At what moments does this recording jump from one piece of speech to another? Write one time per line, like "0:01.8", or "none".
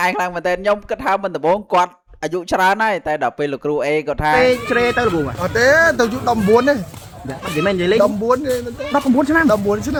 none